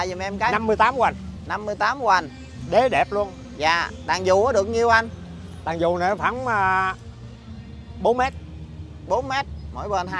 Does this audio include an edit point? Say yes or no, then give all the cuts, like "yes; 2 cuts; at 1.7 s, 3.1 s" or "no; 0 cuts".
no; 0 cuts